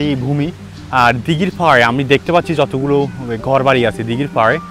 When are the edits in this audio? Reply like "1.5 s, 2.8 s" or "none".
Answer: none